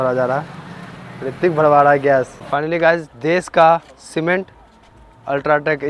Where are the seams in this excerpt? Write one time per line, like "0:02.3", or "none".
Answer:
0:02.4